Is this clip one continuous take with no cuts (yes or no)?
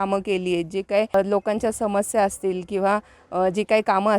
no